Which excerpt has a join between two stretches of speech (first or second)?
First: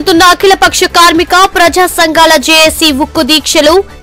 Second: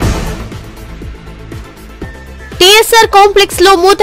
second